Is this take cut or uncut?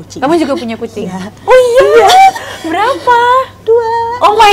uncut